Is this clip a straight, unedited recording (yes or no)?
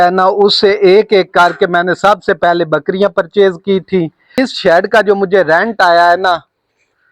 no